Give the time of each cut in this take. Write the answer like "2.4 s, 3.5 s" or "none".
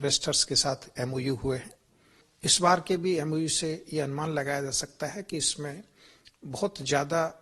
2.2 s